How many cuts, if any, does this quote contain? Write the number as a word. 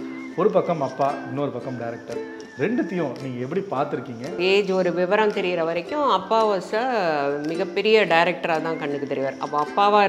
one